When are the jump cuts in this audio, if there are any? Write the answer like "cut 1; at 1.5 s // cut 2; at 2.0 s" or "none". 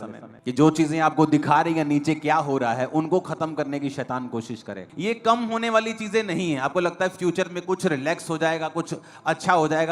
cut 1; at 4.8 s